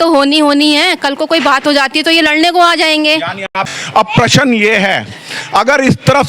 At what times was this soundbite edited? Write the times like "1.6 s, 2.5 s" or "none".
3.6 s